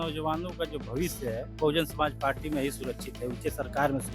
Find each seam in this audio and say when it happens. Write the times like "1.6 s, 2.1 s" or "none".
none

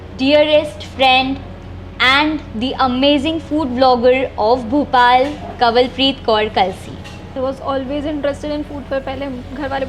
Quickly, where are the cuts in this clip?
7.3 s

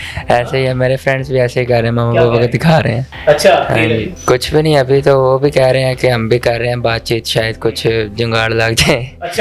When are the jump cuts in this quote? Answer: 3.0 s, 4.1 s

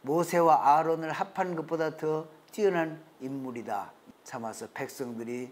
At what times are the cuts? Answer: 4.0 s

